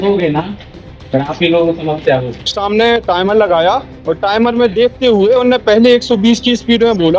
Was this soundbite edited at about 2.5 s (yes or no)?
yes